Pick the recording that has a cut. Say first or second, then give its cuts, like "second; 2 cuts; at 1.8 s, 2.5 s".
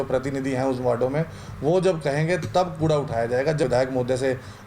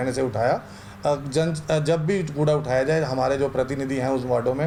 first; 1 cut; at 3.6 s